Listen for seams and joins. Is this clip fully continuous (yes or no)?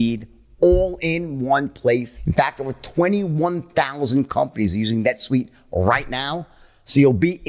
no